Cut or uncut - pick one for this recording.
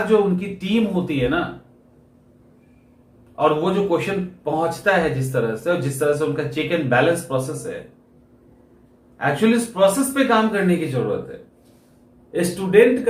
uncut